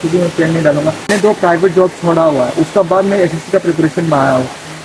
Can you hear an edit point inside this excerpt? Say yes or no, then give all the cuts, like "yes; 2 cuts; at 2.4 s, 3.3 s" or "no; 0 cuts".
no; 0 cuts